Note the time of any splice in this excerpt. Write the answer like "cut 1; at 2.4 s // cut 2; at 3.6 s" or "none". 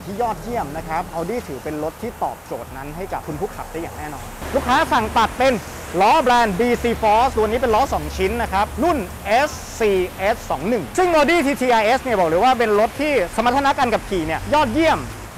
cut 1; at 4.3 s // cut 2; at 10.9 s

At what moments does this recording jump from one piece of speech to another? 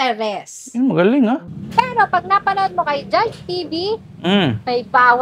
cut 1; at 1.6 s

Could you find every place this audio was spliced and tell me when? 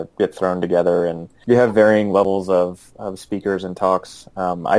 cut 1; at 1.3 s

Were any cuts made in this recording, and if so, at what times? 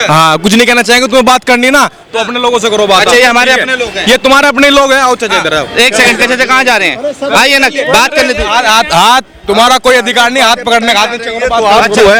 none

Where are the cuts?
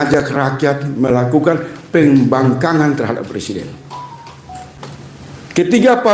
none

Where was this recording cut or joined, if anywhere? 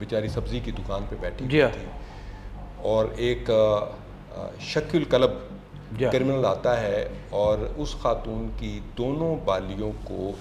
none

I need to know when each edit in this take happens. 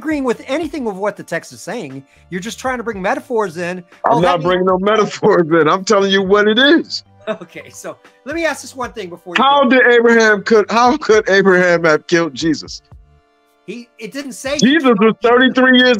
none

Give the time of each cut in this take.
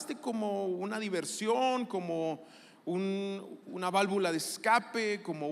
none

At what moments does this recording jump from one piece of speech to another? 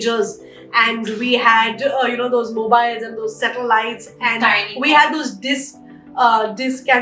none

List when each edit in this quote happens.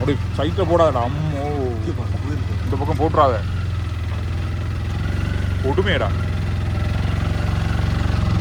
none

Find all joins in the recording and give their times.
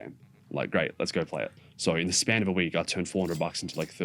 cut 1; at 1.6 s

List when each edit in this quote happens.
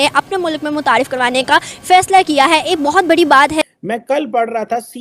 cut 1; at 3.6 s

